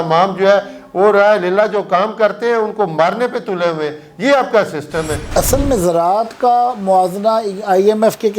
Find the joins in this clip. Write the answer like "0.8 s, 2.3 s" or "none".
5.2 s